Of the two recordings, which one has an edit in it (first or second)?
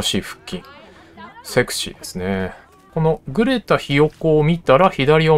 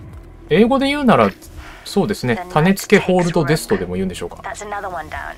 first